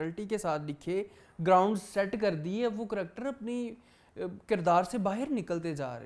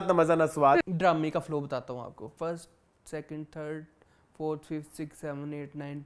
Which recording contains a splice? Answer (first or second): second